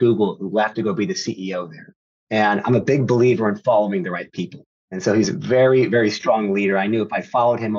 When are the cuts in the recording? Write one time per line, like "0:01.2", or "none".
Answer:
none